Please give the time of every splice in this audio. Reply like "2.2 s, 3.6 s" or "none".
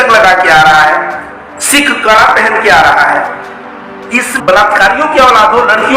4.3 s